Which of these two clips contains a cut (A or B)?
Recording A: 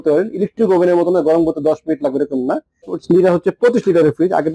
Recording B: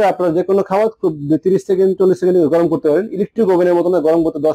A